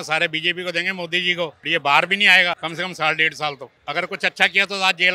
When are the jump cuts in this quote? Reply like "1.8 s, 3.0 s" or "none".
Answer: 1.6 s, 2.6 s, 3.7 s